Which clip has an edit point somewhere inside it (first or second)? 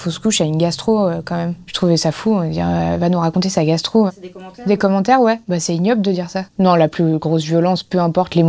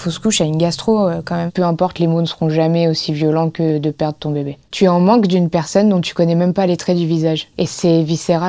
second